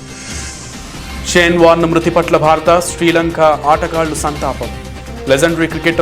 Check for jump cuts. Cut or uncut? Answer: cut